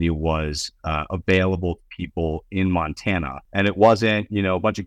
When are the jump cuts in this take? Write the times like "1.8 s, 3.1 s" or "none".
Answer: 3.4 s